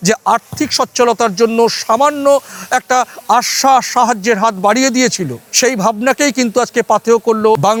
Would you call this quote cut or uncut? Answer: uncut